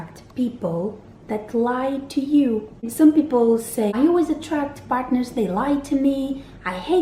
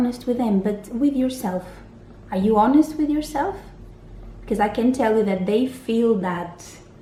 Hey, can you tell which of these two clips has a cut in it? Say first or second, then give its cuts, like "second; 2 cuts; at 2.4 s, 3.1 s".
first; 2 cuts; at 2.9 s, 3.9 s